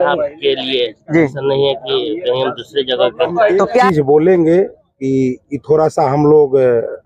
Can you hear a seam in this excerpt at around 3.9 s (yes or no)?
yes